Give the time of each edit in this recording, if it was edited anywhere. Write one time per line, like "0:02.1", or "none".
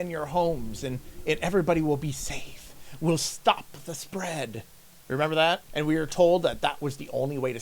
0:05.7